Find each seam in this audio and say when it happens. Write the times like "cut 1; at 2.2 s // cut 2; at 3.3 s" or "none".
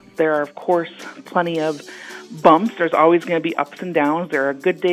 none